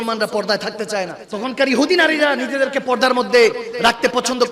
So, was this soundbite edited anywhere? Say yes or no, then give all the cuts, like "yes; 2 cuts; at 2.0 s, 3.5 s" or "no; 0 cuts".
yes; 1 cut; at 1.2 s